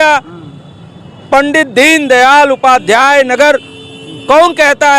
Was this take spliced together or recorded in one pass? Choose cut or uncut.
uncut